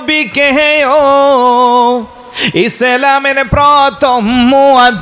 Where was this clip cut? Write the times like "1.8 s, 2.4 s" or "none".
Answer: none